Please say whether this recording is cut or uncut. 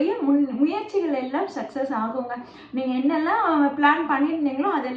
uncut